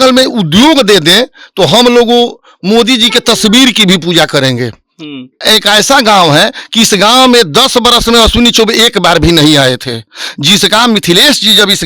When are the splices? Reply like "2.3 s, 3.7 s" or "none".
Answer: 5.4 s